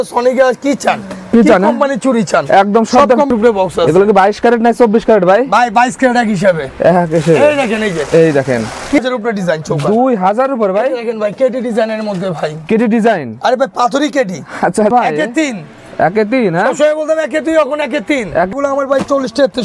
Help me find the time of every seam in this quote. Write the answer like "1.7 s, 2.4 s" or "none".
3.3 s, 9.0 s, 14.9 s, 18.5 s